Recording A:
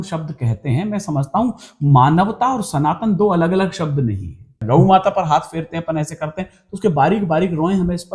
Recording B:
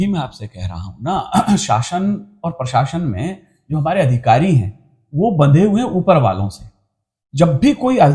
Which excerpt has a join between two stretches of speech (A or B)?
A